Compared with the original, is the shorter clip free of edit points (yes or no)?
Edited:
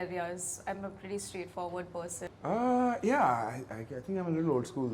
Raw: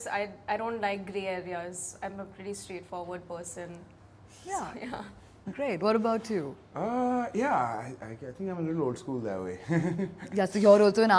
no